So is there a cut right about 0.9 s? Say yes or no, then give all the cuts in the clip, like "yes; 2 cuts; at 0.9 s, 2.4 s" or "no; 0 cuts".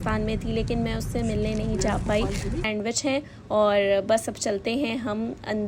no; 1 cut; at 2.6 s